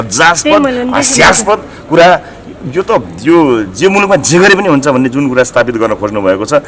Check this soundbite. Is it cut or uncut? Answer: uncut